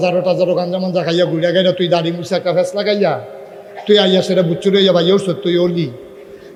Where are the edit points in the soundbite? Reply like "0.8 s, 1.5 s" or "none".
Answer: none

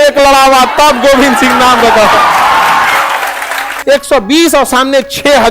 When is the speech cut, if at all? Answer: 3.7 s

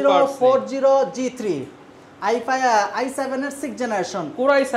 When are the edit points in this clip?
none

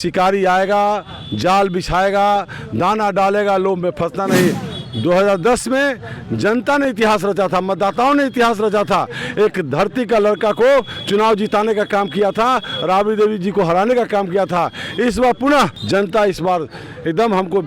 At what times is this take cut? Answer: 4.7 s, 15.8 s

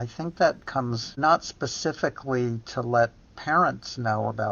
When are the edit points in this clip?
1.1 s

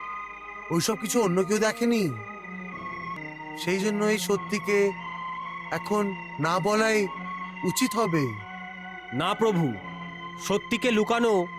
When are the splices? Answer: 3.2 s

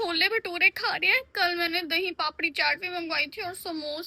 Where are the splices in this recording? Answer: none

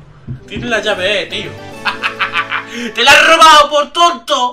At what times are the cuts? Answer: none

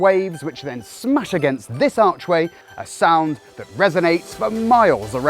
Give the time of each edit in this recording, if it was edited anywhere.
2.6 s

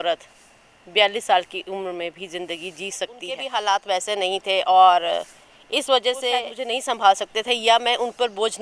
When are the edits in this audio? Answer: 3.4 s, 6.6 s

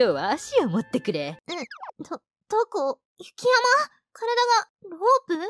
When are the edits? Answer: 1.3 s

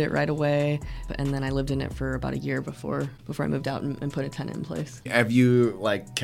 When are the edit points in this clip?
1.1 s, 3.2 s, 5.1 s

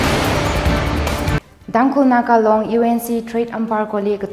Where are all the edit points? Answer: 1.4 s

